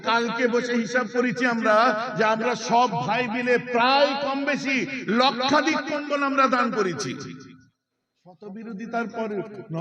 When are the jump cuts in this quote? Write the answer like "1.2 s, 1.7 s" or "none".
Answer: 8.4 s

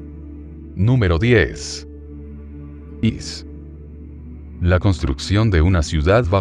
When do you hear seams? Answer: 5.2 s

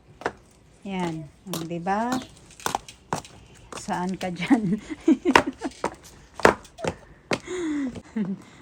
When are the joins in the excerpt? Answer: none

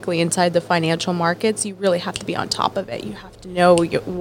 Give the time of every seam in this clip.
none

